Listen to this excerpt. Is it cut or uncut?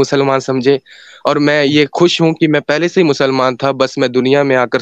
uncut